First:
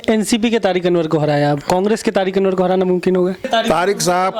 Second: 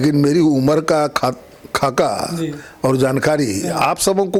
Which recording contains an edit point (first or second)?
first